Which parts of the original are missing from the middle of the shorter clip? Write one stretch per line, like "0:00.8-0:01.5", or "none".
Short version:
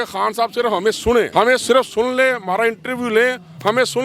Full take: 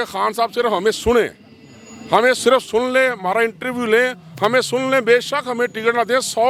0:01.3-0:02.1